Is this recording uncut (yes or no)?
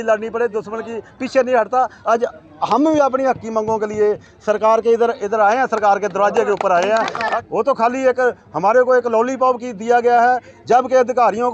no